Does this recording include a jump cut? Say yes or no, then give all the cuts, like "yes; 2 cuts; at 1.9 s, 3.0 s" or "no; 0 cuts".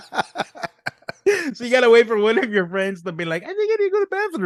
no; 0 cuts